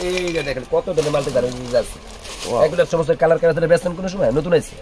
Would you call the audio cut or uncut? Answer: cut